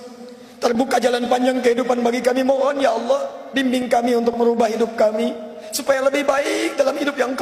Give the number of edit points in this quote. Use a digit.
0